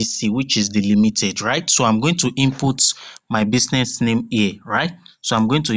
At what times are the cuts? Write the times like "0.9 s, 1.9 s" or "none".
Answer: none